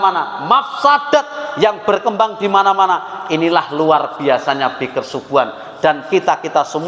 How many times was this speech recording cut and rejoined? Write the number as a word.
zero